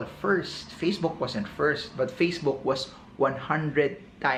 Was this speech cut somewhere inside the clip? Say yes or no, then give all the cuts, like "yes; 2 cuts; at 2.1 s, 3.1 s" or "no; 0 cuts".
no; 0 cuts